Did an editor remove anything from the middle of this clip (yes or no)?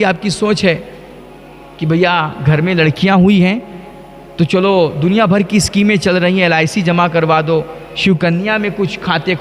no